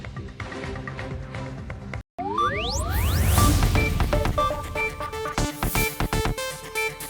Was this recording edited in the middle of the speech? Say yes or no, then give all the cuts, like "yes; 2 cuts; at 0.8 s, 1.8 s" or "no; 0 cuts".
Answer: no; 0 cuts